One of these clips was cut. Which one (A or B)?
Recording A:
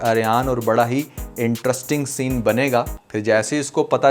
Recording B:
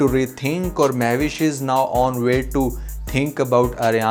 A